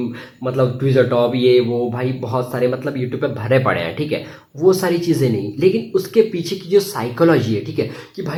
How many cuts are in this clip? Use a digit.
0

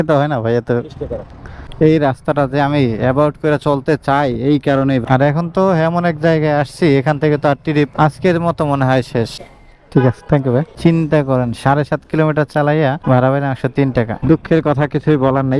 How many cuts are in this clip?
5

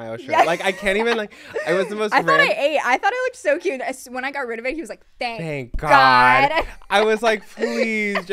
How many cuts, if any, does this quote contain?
0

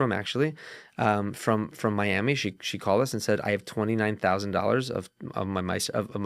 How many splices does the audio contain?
0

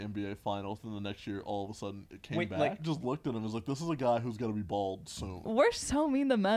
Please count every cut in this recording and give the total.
2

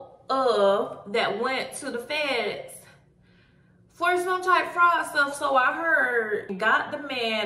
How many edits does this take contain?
1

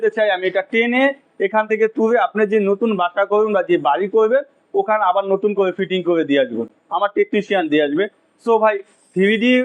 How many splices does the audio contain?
0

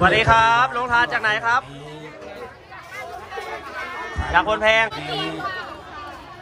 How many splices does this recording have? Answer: 1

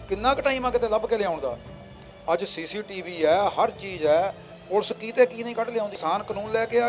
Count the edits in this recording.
1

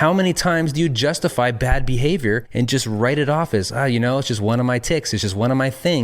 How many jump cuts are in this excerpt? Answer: 1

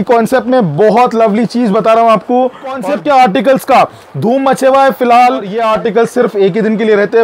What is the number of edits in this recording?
2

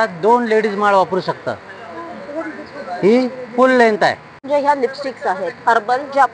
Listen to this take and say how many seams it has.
1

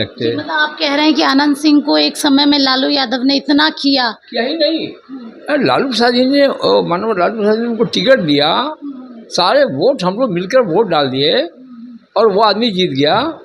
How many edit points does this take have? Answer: 0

